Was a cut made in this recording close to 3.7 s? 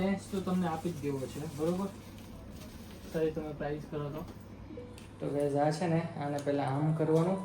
no; 1 cut; at 5.2 s

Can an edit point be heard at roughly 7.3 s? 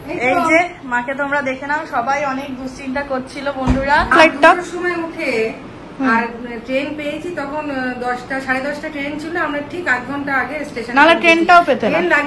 no; 1 cut; at 4.1 s

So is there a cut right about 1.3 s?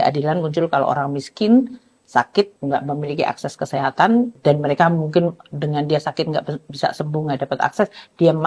no; 1 cut; at 4.3 s

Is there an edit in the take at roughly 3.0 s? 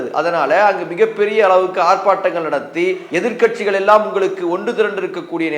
yes; 1 cut; at 3.0 s

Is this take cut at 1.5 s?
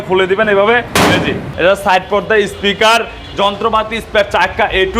yes; 1 cut; at 1.5 s

